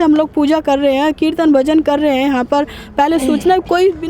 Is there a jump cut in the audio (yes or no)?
no